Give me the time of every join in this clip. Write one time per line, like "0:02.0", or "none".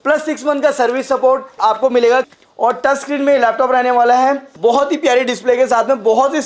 0:01.5
0:02.3
0:04.5